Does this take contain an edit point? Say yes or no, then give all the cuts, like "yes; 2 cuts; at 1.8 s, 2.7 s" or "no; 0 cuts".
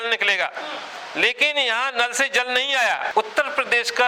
yes; 1 cut; at 3.1 s